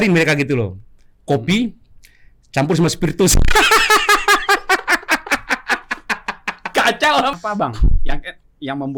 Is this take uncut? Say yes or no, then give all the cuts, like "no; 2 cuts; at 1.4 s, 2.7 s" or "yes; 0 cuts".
no; 1 cut; at 7.3 s